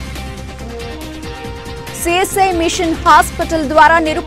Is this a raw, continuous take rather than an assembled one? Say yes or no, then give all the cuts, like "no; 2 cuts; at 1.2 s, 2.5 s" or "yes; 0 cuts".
no; 1 cut; at 1.1 s